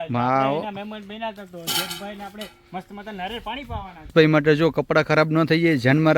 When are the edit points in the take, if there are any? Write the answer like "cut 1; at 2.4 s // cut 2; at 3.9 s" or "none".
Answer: cut 1; at 4.1 s